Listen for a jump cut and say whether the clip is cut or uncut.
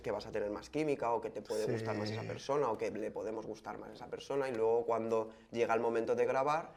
uncut